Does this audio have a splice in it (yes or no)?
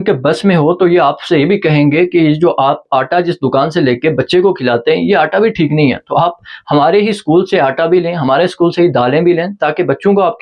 no